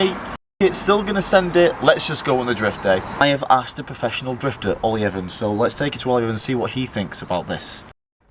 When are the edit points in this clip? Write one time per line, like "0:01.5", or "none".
0:03.2